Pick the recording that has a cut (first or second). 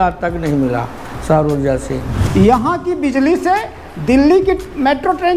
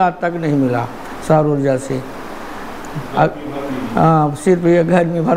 first